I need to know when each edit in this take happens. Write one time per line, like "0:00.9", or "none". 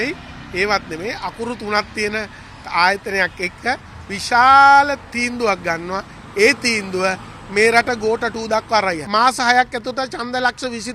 0:09.0